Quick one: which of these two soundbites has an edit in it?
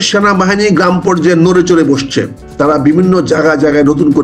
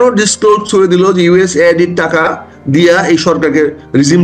first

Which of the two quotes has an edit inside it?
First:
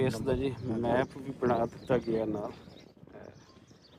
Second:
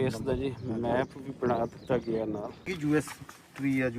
second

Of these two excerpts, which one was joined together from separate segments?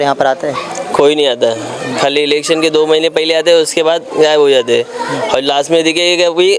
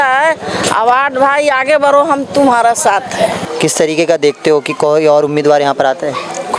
second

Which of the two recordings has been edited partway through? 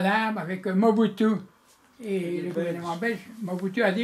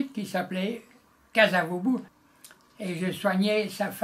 second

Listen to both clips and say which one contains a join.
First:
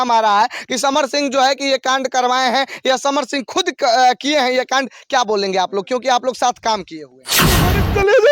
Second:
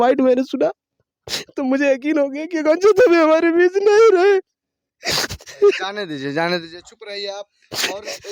first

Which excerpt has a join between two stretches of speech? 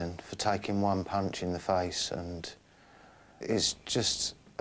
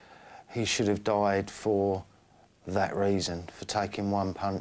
first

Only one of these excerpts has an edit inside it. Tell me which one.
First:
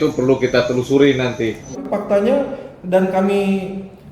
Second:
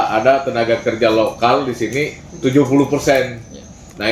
first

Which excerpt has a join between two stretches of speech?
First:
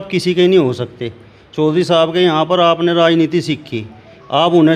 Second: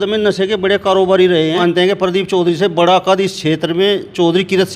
second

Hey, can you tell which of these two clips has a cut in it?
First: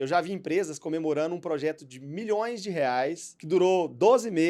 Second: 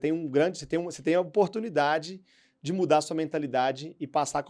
first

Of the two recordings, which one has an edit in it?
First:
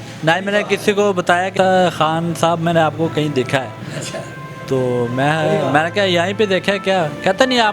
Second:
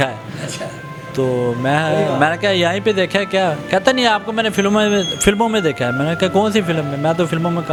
first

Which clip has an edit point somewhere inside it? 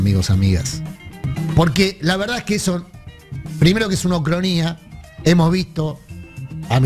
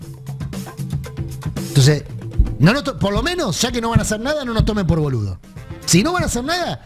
first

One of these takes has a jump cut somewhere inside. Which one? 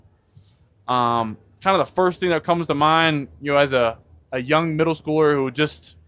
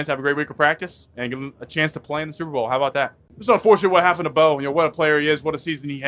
second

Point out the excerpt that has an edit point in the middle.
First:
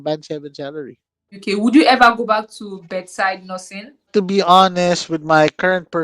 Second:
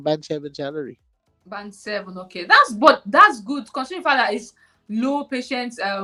first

